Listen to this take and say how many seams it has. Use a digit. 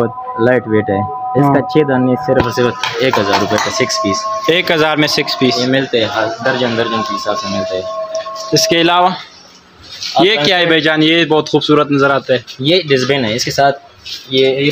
0